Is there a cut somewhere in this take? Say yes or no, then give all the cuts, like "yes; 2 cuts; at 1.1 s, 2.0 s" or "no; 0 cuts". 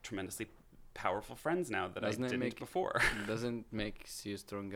no; 0 cuts